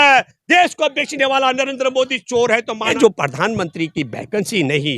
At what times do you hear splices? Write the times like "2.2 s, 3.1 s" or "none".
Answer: 2.9 s